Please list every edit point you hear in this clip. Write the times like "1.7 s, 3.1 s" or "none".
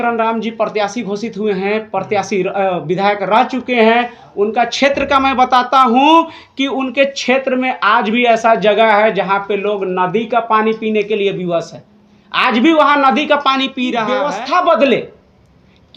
14.1 s